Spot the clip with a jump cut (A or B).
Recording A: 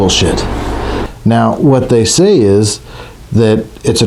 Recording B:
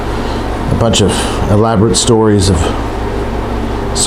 A